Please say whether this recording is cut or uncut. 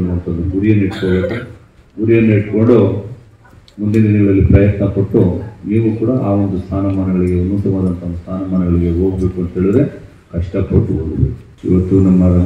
cut